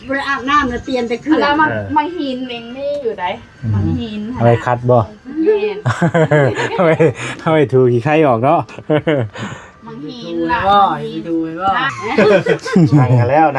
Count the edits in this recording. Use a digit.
1